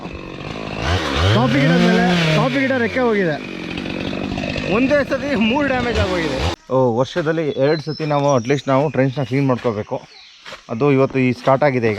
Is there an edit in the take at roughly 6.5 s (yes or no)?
yes